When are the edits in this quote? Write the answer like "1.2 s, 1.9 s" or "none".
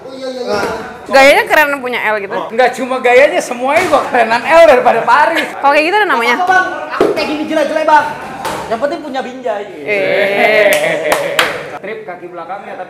0.9 s, 2.5 s, 5.5 s, 11.7 s